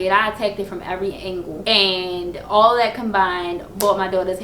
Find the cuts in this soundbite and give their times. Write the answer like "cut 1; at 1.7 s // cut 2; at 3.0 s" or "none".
cut 1; at 1.6 s

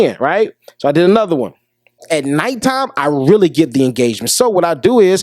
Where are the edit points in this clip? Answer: cut 1; at 2.0 s

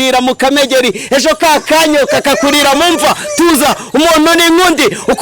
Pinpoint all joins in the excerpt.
none

